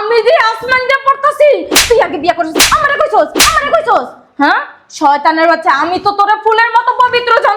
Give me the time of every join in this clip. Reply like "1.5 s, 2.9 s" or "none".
none